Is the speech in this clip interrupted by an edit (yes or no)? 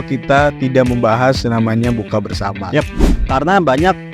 yes